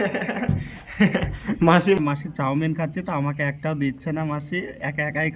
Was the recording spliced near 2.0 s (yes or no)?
yes